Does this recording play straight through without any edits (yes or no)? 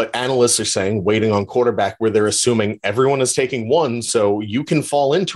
yes